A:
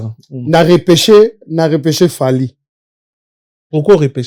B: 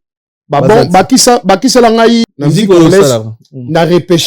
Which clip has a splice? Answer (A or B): B